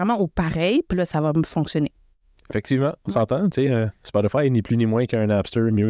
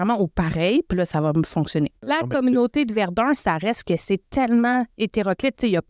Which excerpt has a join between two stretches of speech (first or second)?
second